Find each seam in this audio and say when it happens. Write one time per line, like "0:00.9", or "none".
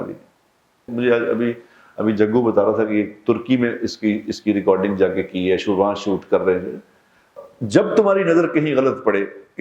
0:00.9
0:07.4